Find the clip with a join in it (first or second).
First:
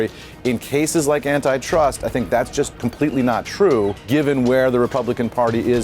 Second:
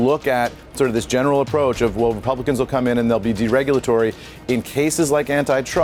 first